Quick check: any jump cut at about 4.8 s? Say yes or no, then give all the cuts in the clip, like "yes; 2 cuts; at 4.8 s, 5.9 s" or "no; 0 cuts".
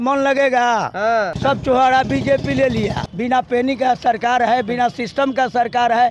no; 2 cuts; at 1.3 s, 3.0 s